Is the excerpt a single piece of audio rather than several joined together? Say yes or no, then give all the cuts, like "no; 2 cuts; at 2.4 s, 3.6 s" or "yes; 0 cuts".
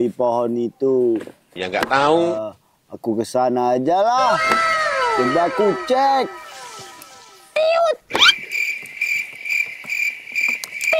yes; 0 cuts